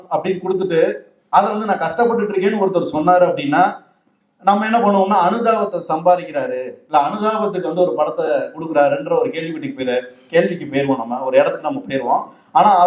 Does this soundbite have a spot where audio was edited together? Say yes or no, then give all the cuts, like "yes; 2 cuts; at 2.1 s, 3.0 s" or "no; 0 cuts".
no; 0 cuts